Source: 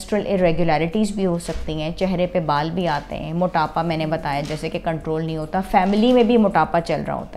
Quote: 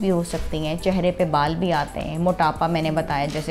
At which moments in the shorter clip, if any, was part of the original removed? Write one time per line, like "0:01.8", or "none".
none

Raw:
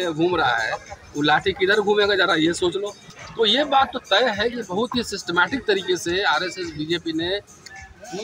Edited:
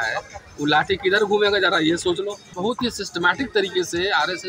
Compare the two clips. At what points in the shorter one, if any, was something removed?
0:02.5

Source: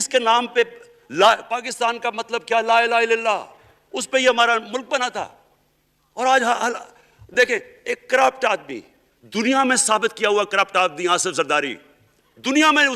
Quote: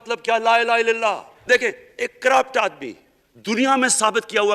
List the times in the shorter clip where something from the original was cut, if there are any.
0:01.3

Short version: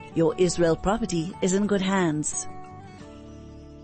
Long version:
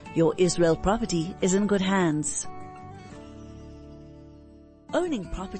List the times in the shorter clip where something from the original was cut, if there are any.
0:02.3

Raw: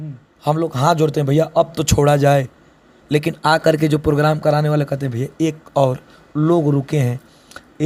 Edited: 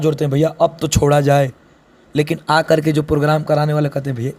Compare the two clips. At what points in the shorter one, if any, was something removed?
none

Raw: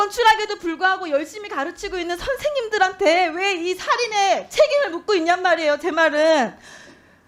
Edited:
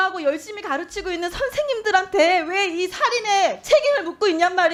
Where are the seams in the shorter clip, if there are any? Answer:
none

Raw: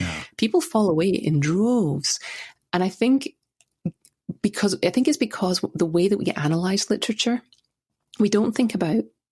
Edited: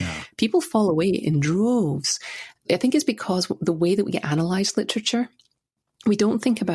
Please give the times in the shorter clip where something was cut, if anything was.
0:02.6

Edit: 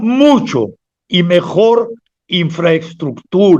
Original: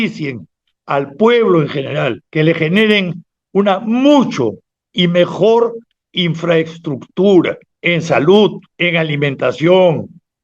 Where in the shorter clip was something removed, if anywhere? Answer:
none

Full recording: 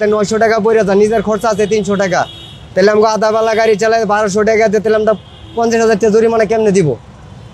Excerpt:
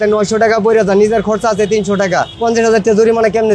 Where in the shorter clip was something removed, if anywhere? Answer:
0:02.3

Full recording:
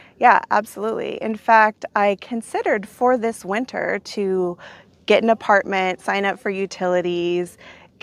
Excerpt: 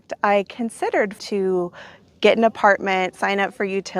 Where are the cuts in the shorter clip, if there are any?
0:01.2

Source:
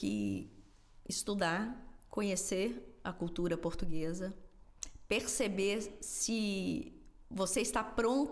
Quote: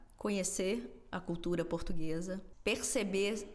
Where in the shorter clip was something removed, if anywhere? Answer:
0:02.5

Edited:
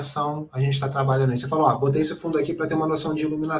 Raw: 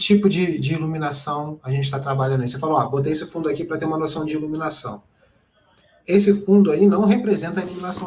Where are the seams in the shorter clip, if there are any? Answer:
none

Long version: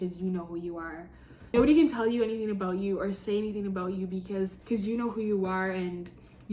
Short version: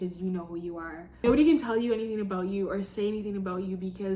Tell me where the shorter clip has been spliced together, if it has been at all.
0:01.0

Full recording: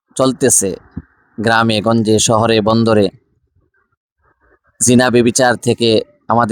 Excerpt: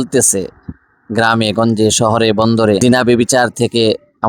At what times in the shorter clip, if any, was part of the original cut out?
0:02.8

